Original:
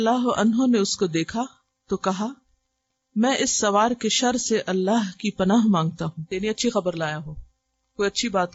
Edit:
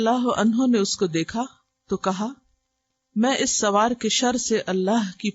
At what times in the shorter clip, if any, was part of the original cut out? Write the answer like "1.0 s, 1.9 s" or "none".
none